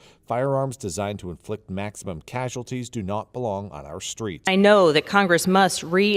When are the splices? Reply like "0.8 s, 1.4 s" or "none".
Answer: none